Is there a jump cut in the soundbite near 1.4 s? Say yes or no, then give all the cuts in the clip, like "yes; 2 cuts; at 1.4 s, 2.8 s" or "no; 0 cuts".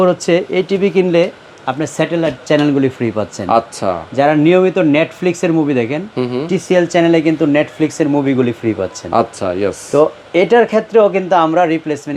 no; 0 cuts